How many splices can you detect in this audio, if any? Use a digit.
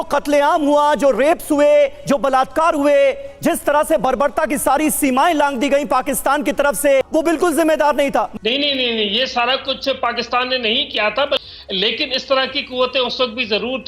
3